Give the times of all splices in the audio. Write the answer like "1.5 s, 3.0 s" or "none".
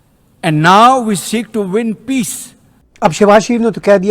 2.7 s